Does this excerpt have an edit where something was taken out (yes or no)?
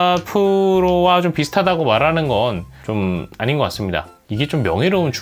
no